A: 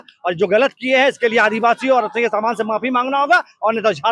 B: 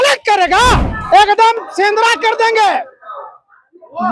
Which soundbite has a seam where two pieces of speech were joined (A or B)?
B